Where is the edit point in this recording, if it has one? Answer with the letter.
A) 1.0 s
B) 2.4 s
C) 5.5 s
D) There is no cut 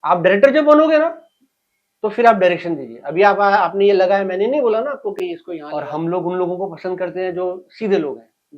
C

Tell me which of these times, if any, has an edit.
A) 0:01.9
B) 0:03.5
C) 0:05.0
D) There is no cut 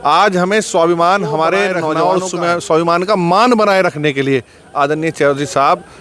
A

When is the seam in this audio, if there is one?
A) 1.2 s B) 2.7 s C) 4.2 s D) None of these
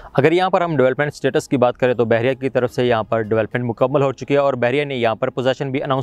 D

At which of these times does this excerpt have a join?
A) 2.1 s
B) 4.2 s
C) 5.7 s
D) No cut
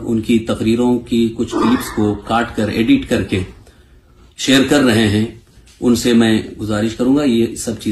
D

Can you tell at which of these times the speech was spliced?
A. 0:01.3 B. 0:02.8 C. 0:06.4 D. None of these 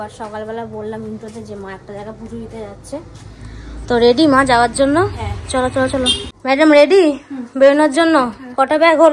C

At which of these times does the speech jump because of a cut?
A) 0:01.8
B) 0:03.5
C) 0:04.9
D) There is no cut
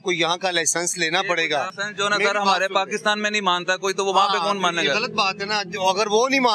A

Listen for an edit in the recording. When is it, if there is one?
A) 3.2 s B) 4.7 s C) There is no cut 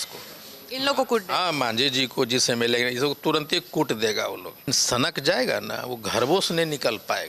B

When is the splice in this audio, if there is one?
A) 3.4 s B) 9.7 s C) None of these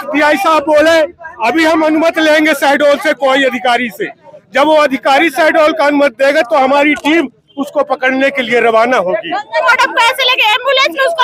B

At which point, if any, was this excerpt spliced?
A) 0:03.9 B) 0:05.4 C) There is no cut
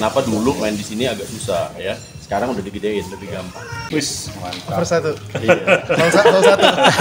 A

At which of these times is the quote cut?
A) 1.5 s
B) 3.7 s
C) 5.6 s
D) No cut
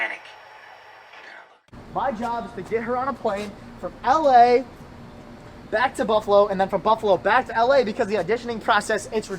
A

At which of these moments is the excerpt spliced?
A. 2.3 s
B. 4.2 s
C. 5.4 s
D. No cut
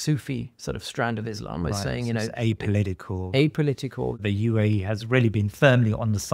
B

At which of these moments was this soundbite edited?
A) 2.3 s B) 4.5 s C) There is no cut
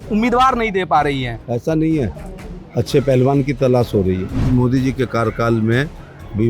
B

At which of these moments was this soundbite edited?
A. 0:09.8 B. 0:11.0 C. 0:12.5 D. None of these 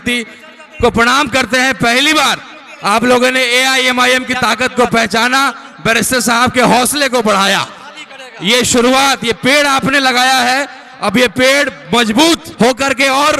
C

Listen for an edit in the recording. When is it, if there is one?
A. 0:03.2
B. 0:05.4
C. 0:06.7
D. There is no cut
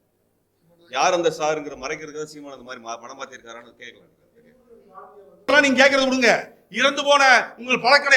B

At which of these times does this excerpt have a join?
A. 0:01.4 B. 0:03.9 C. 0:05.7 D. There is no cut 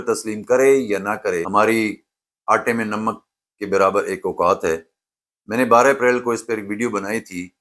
A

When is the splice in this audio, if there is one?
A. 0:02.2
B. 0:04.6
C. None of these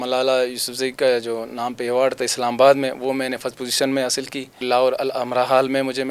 B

